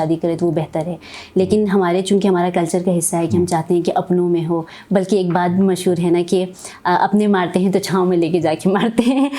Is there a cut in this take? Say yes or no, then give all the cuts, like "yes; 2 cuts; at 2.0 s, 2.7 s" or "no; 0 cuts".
no; 0 cuts